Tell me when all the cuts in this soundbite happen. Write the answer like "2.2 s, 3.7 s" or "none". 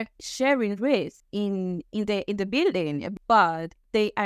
1.2 s, 3.1 s

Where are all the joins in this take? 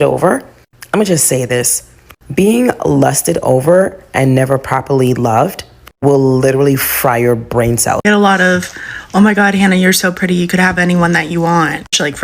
8.0 s

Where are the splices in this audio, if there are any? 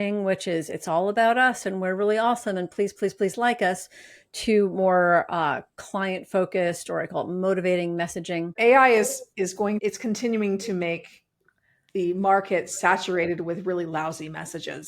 8.5 s, 9.8 s

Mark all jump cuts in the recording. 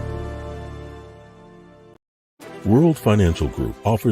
2.5 s

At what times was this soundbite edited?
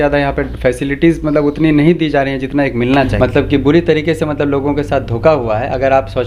3.1 s

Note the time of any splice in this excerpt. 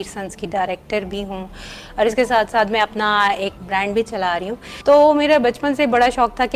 3.6 s, 4.7 s

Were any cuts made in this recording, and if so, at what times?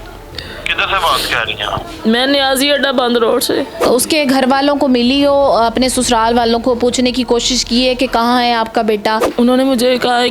3.9 s, 9.3 s

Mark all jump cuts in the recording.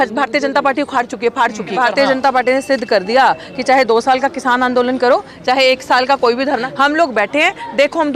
1.7 s, 6.6 s

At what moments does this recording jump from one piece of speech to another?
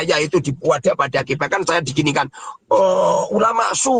none

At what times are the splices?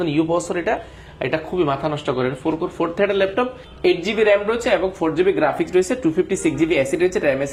none

